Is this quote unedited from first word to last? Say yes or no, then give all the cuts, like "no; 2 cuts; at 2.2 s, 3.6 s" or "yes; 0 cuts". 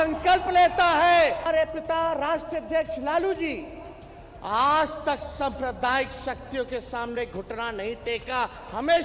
no; 1 cut; at 1.4 s